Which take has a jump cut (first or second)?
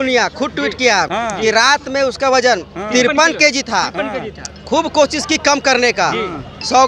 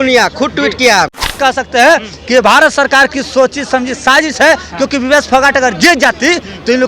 second